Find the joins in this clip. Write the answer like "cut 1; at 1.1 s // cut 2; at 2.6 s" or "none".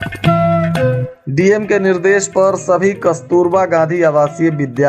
cut 1; at 1.1 s